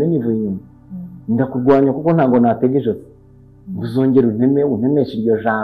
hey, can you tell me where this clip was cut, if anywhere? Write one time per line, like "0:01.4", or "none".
none